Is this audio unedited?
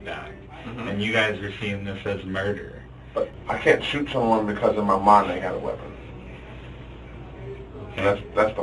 no; 1 cut; at 3.4 s

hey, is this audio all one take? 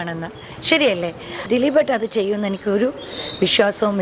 no; 1 cut; at 1.5 s

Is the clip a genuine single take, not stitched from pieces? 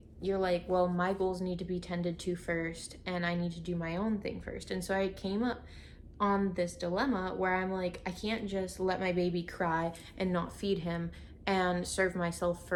yes; 0 cuts

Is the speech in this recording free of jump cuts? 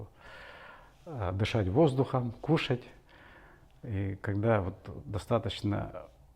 yes; 0 cuts

